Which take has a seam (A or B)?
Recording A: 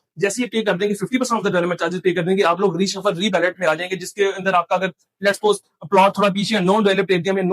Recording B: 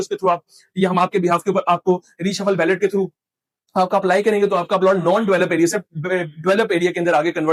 A